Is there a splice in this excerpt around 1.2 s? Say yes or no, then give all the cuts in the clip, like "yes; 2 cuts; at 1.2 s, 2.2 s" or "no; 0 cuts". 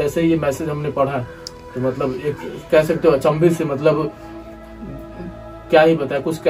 no; 0 cuts